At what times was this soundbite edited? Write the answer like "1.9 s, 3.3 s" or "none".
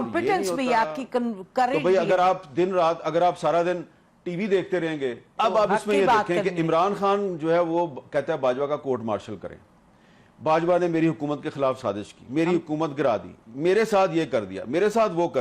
5.2 s